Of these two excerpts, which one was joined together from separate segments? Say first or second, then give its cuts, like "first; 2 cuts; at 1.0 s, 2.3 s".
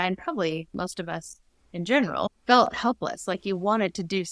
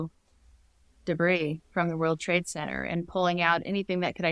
first; 1 cut; at 2.4 s